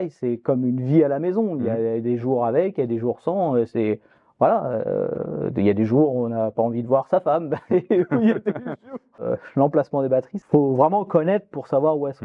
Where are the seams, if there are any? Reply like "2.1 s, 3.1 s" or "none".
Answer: 9.2 s, 10.4 s